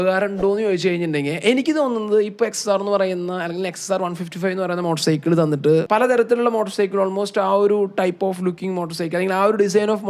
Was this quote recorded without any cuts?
no; 1 cut; at 5.9 s

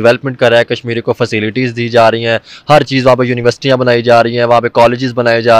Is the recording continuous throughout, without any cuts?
yes; 0 cuts

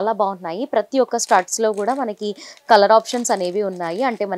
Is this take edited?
no; 0 cuts

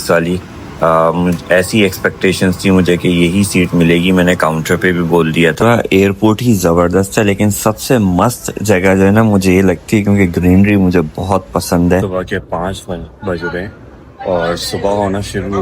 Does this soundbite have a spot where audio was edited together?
yes; 2 cuts; at 5.6 s, 12.0 s

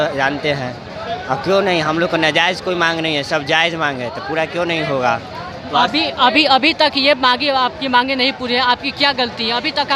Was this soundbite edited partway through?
no; 0 cuts

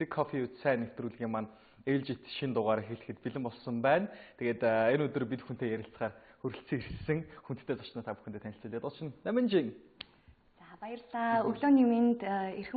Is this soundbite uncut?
yes; 0 cuts

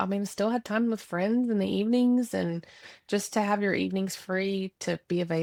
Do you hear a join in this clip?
no; 0 cuts

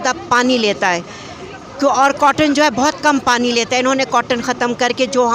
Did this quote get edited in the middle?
no; 0 cuts

